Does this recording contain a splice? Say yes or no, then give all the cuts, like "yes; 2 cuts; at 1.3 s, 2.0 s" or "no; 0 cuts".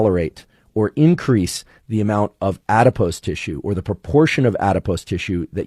no; 0 cuts